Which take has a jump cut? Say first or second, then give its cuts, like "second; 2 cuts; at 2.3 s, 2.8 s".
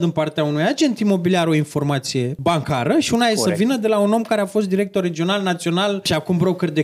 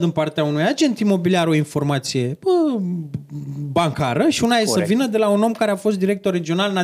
first; 2 cuts; at 2.3 s, 6.0 s